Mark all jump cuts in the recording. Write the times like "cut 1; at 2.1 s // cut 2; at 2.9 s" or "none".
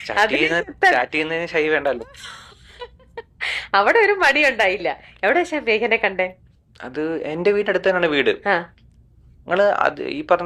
none